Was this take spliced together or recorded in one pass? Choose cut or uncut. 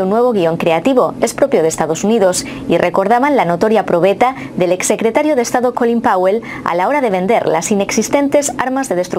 uncut